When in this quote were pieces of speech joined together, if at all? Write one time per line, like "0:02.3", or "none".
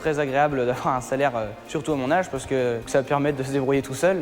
0:02.9